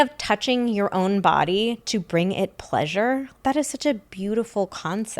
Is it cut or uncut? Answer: cut